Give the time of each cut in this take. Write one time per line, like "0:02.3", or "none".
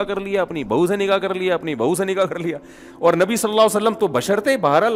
none